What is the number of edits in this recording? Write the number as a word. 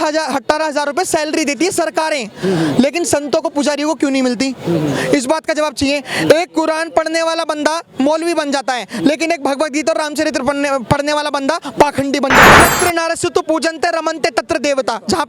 one